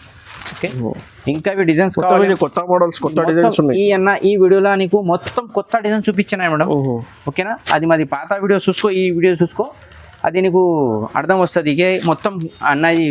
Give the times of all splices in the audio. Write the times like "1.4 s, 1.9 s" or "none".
none